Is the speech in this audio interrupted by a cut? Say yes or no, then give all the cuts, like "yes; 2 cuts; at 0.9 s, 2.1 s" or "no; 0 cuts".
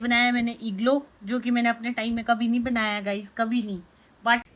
no; 0 cuts